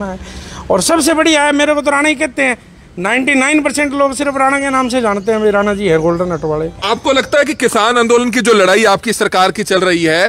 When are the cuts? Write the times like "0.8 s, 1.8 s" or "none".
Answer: 6.8 s